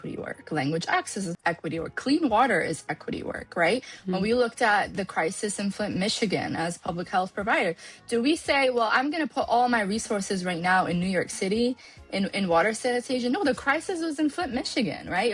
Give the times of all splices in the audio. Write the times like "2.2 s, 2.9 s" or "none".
1.3 s